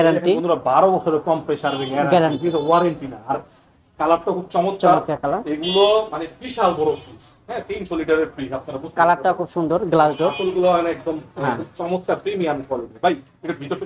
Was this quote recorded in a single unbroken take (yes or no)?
yes